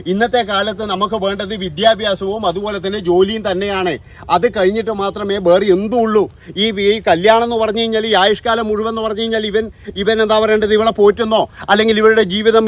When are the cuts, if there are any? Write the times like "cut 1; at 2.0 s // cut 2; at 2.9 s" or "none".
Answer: none